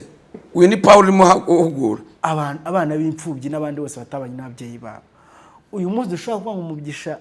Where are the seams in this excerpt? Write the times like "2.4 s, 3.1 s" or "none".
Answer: 2.1 s